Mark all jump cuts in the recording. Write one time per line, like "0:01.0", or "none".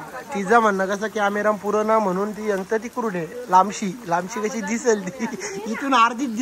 none